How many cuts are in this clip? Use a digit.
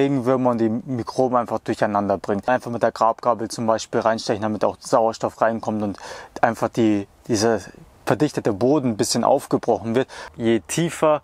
2